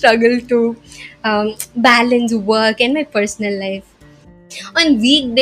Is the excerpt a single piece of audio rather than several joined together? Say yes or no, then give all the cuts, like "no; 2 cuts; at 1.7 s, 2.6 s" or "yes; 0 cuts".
no; 1 cut; at 4.5 s